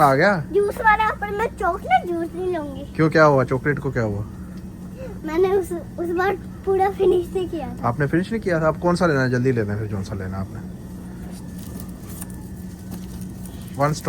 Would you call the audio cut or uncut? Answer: uncut